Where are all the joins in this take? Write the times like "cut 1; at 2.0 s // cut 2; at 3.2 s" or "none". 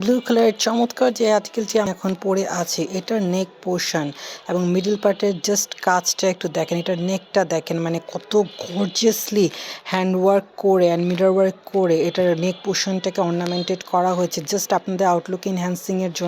cut 1; at 1.7 s